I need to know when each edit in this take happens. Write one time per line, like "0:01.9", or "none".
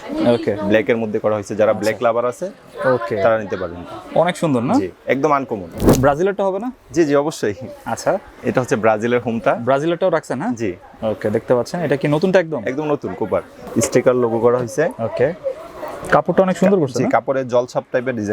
0:05.8
0:13.6